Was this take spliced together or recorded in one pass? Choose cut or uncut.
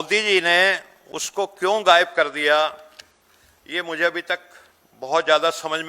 uncut